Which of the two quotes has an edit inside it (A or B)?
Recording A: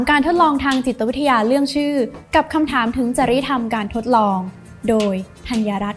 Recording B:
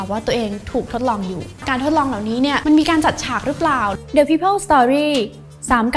B